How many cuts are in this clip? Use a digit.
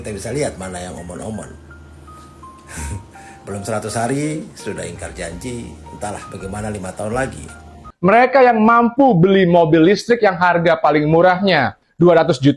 1